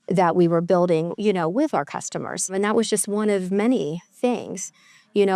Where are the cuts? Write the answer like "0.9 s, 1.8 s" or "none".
2.5 s

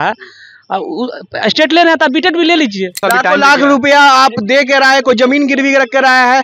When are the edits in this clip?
2.9 s

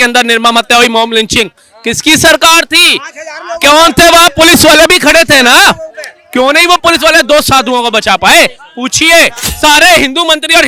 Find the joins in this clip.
9.4 s

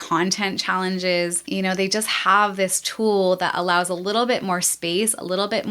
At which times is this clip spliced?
1.4 s

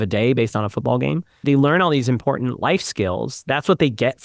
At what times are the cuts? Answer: 1.4 s

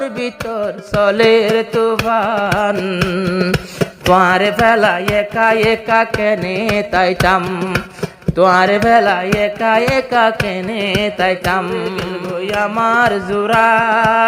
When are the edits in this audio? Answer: 12.1 s

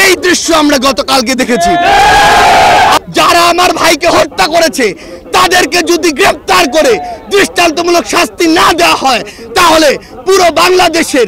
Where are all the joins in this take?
3.0 s

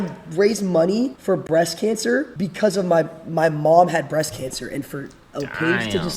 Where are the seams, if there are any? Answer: 1.2 s, 2.3 s

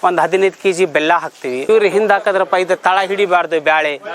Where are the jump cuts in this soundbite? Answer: 1.6 s

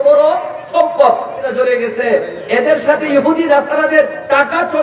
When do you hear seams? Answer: 1.4 s

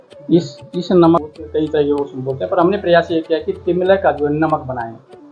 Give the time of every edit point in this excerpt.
1.3 s

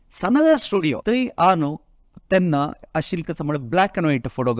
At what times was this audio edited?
1.0 s

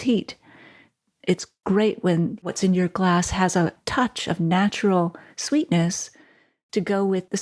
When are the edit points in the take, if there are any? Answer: 1.5 s, 2.4 s

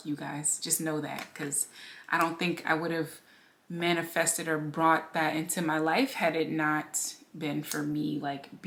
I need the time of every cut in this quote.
none

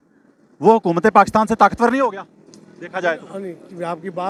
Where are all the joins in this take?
none

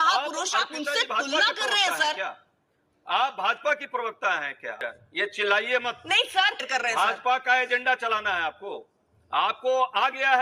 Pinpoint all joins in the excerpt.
4.8 s, 6.6 s

